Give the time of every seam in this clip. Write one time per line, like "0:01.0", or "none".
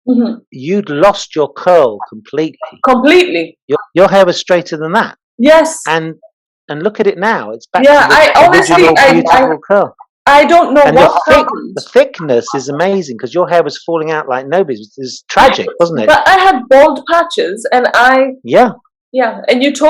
0:03.8